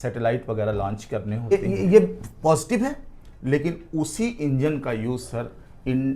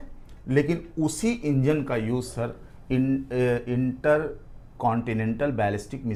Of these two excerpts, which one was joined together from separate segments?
first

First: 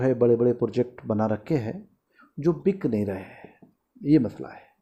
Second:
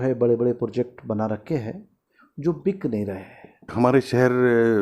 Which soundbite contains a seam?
second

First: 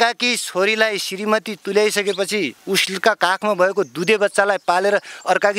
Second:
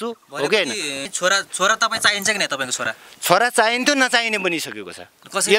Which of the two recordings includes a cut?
second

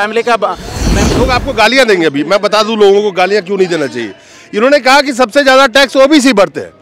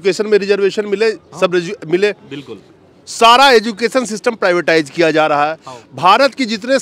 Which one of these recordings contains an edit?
first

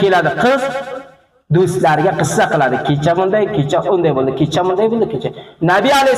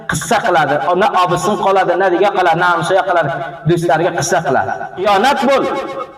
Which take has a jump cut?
second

